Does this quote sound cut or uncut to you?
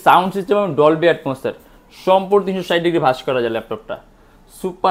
uncut